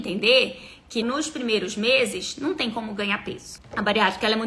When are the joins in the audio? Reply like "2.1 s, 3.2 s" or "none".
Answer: 1.0 s, 3.5 s

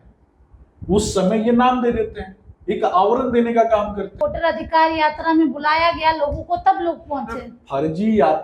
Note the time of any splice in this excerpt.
4.0 s

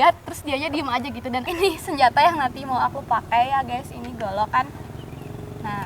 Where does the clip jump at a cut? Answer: 1.4 s

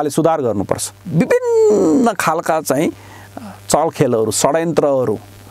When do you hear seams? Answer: 0.9 s

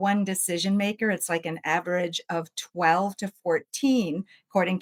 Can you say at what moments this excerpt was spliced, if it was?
none

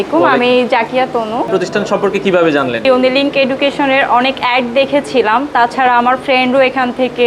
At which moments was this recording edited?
1.5 s, 2.8 s

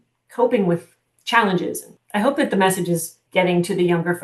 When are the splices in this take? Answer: 1.9 s, 3.2 s

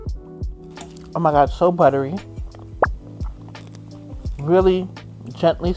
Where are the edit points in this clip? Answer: 1.1 s

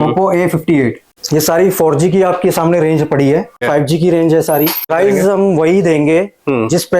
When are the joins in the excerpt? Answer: 1.1 s, 3.6 s, 4.9 s

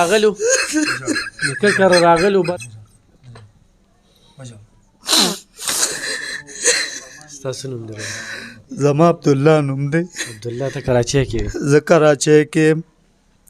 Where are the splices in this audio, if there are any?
2.5 s

